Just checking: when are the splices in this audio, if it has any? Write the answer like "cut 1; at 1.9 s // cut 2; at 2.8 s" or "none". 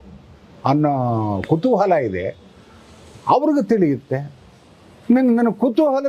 none